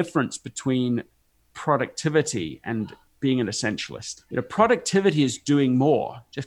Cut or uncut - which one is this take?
cut